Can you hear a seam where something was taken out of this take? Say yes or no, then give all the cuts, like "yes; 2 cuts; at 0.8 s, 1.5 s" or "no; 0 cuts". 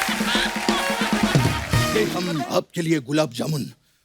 yes; 1 cut; at 1.9 s